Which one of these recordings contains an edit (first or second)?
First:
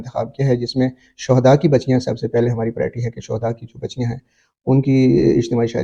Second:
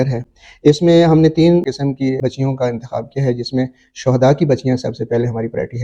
second